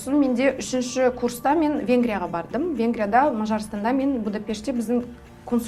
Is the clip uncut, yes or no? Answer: yes